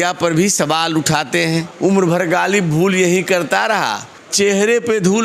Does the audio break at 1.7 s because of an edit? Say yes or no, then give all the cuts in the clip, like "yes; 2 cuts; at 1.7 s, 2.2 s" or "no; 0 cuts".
yes; 1 cut; at 1.7 s